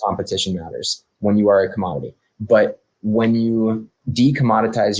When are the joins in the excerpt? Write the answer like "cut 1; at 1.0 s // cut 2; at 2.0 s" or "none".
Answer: cut 1; at 4.0 s